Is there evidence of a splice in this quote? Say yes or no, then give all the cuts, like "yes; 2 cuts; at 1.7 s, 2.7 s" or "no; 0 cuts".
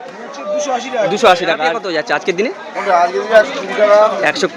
yes; 1 cut; at 1.8 s